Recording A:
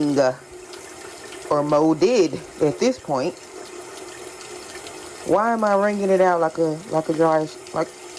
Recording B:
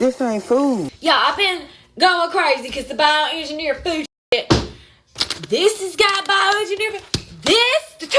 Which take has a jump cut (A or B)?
B